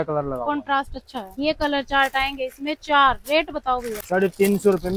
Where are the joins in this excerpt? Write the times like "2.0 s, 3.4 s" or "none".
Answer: 1.2 s, 4.0 s

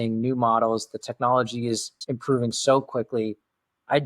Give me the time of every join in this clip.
2.0 s

